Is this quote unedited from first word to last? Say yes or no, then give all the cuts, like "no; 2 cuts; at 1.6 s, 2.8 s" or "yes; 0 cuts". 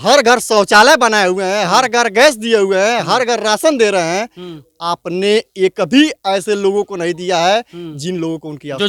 yes; 0 cuts